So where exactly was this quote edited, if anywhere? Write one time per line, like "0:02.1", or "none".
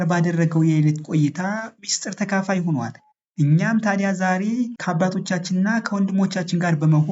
0:04.8